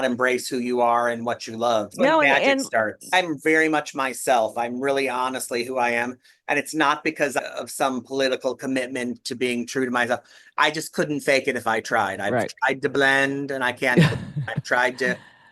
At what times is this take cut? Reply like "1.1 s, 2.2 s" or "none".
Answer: 2.0 s, 3.1 s